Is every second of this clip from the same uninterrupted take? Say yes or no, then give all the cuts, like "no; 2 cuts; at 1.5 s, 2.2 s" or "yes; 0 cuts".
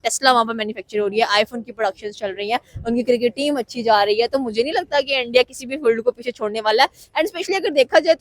yes; 0 cuts